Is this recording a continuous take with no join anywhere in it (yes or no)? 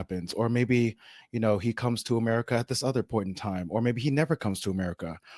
yes